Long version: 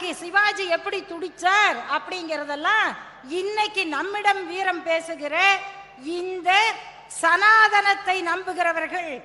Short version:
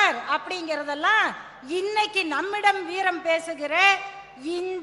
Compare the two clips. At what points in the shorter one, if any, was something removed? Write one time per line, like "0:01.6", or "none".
none